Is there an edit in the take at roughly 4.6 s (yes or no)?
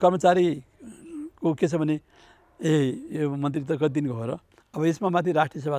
yes